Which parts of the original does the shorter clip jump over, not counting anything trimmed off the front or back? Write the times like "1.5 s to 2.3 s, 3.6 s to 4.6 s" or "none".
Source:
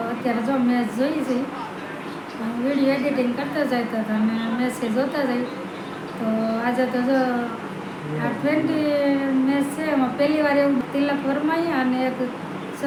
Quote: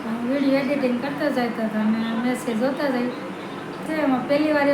6.2 s to 9.7 s